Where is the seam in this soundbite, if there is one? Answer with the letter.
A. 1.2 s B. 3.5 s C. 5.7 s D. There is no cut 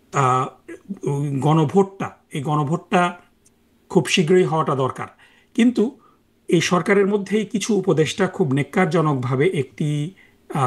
D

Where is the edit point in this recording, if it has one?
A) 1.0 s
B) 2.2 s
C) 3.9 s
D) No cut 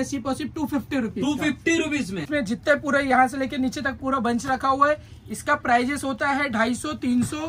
B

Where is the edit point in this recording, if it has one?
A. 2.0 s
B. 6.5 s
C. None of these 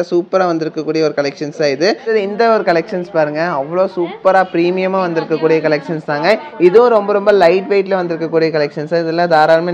A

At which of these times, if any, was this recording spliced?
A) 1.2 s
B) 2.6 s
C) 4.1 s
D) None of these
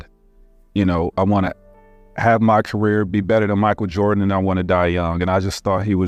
D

